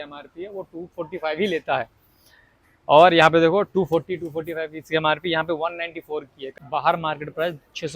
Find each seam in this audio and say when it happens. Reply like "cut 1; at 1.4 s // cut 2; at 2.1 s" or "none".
cut 1; at 6.4 s

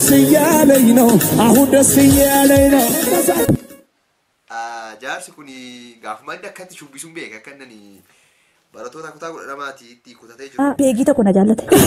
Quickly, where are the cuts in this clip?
cut 1; at 3.0 s // cut 2; at 10.5 s

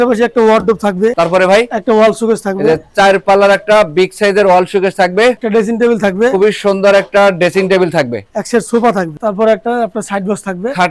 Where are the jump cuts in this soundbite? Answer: cut 1; at 1.1 s // cut 2; at 5.4 s // cut 3; at 9.1 s

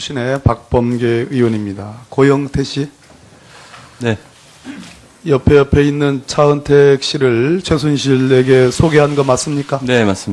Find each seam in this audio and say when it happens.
none

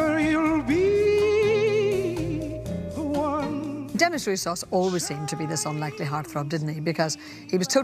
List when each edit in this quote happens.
none

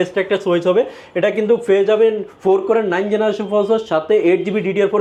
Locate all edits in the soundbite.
none

